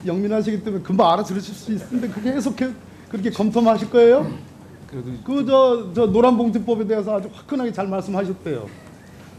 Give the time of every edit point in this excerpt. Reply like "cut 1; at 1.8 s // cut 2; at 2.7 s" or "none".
none